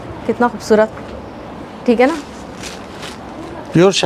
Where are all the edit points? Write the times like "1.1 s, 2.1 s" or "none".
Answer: none